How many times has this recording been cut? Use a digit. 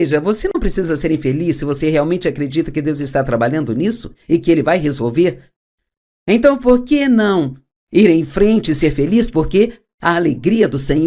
0